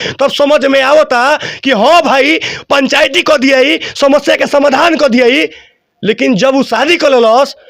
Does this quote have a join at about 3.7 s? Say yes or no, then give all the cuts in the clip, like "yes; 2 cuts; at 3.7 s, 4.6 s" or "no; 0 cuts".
no; 0 cuts